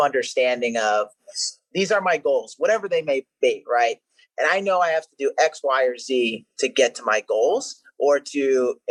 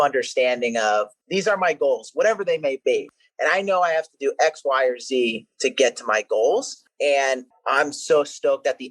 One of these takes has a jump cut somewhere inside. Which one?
second; 4 cuts; at 1.2 s, 2.9 s, 6.8 s, 7.5 s

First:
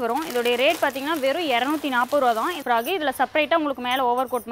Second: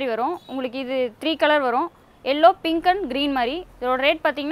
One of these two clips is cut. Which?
first; 1 cut; at 2.6 s

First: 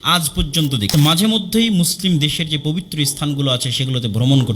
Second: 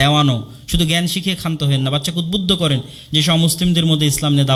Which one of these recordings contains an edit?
first; 1 cut; at 0.9 s

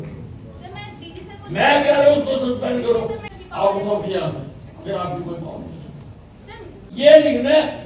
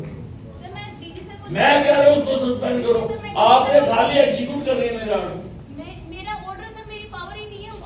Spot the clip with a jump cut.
first; 2 cuts; at 3.2 s, 6.9 s

